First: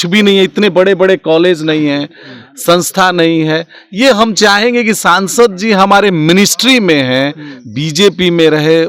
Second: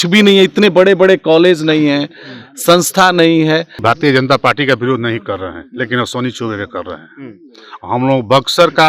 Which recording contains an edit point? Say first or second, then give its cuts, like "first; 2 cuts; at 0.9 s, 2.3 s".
second; 1 cut; at 3.8 s